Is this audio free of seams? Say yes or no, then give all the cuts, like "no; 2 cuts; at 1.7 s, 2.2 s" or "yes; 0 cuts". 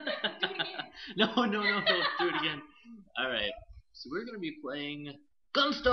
no; 1 cut; at 3.7 s